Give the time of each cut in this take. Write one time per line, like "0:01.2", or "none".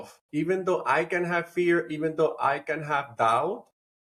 none